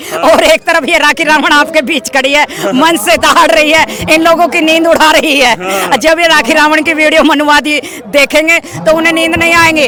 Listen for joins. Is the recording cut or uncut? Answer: uncut